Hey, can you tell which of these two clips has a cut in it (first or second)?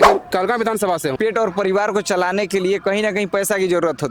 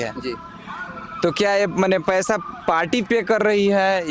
first